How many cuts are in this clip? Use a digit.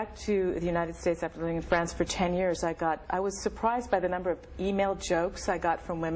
0